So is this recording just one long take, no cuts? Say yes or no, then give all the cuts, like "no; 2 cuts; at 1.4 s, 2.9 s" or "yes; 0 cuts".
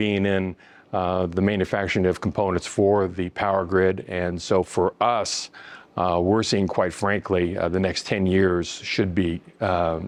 yes; 0 cuts